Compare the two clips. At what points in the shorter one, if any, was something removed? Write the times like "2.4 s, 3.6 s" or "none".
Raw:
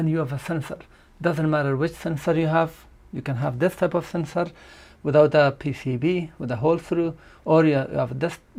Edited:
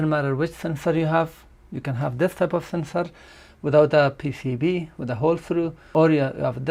5.8 s